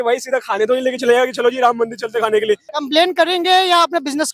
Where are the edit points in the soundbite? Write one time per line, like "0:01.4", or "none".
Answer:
0:02.7